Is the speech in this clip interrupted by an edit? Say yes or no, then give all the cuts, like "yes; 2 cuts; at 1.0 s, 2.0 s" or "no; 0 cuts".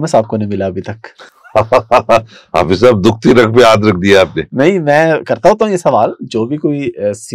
no; 0 cuts